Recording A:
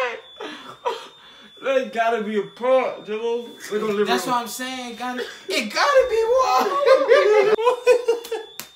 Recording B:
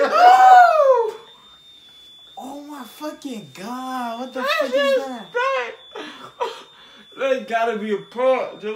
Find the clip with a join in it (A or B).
A